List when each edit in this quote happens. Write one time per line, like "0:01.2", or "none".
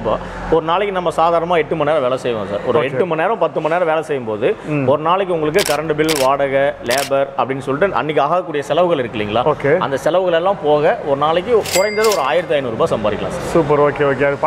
none